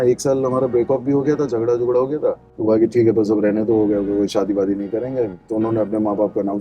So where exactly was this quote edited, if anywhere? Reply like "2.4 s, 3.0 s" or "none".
2.5 s